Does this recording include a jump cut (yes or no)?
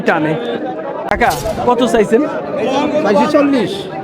yes